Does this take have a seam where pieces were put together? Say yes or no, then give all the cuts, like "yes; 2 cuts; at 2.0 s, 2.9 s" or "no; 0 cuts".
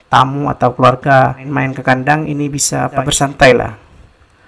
yes; 2 cuts; at 1.4 s, 3.0 s